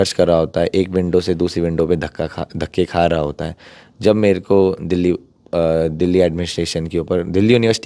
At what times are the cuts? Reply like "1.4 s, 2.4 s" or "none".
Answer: none